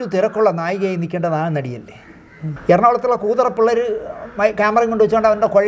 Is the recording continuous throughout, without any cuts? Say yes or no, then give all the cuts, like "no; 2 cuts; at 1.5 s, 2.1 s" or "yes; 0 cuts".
no; 1 cut; at 2.4 s